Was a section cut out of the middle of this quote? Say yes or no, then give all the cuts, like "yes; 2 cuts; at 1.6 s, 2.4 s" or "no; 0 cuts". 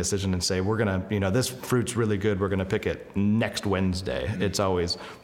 no; 0 cuts